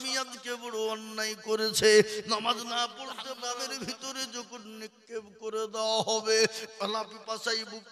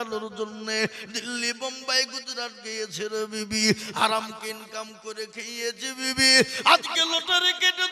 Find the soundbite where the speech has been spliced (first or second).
first